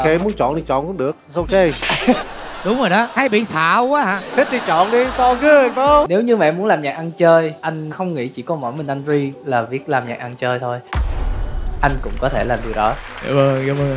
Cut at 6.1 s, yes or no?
yes